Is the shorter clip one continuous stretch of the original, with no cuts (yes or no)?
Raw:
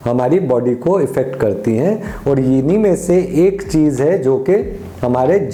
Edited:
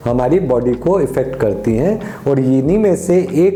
yes